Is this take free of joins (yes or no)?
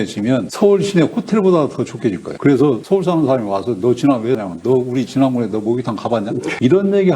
no